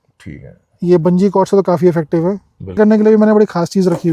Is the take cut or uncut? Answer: cut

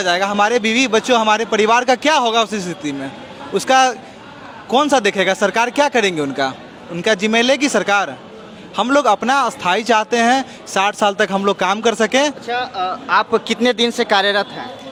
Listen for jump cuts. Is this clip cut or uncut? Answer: uncut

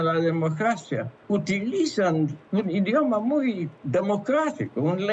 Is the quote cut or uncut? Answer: cut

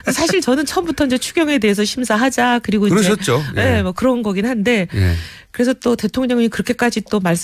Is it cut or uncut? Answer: uncut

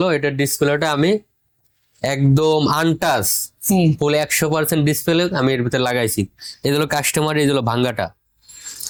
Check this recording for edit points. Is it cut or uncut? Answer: uncut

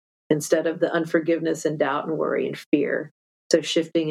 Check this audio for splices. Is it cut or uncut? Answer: uncut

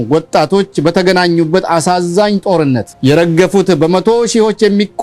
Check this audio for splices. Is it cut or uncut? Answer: cut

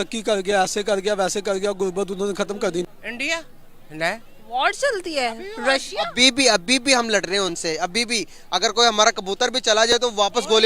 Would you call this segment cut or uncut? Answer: cut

